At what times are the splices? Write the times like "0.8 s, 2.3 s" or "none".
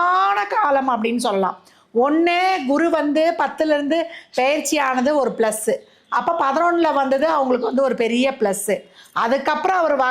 none